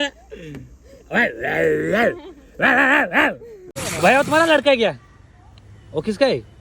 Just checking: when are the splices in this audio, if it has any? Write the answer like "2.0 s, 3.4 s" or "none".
3.8 s

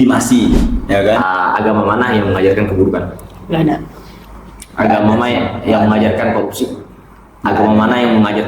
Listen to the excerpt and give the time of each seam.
1.2 s

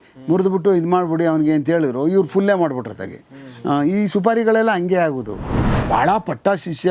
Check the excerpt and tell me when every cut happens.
5.6 s

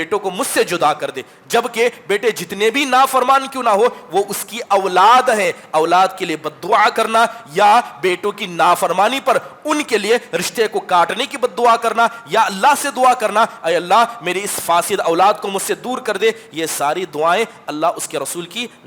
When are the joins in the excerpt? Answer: none

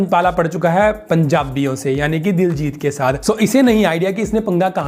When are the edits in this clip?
none

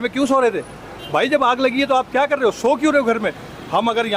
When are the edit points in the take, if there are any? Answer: none

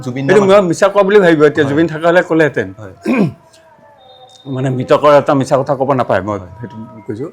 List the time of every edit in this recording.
none

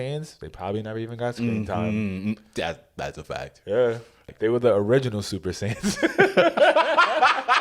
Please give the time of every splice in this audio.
4.3 s

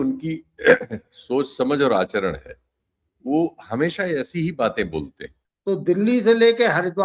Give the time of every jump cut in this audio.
5.5 s

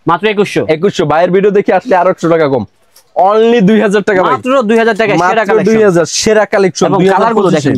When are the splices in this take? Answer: none

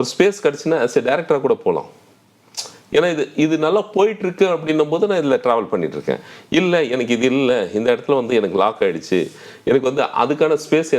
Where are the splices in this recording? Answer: none

